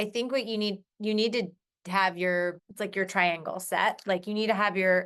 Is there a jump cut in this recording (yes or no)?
yes